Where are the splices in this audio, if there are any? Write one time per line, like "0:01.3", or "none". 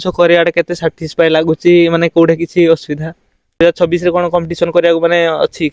0:03.5

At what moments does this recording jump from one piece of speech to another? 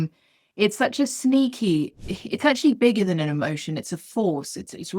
0:02.0

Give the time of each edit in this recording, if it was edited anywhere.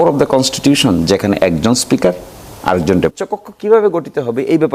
0:03.1

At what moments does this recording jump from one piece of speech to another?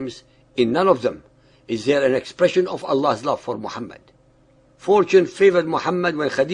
0:05.1

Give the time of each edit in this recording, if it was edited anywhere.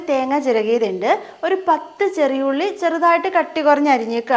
none

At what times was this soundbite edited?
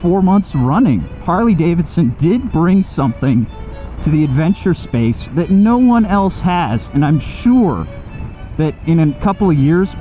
0:01.1

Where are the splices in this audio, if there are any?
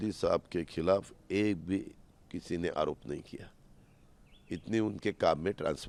none

